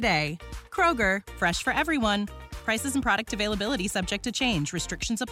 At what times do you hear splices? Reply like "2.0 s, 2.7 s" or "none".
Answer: none